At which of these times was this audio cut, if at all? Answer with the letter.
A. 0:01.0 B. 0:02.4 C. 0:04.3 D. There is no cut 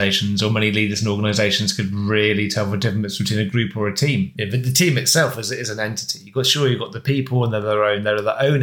C